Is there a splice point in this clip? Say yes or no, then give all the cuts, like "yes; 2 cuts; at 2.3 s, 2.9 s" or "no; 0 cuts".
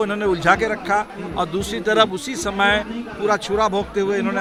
no; 0 cuts